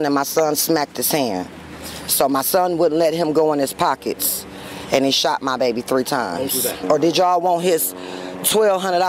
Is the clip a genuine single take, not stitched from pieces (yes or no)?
no